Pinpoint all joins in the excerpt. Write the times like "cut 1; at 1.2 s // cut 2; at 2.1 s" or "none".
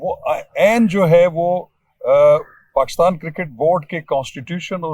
none